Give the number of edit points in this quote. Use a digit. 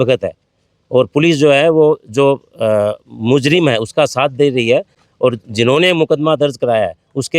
0